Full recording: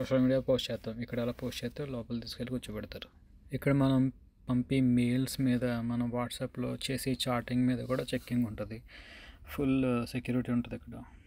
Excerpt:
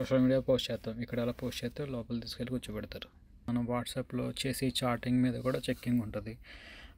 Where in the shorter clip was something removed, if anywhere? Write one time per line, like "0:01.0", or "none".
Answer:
0:03.5